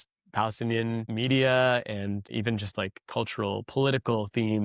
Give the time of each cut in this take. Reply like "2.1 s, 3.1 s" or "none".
1.1 s, 2.3 s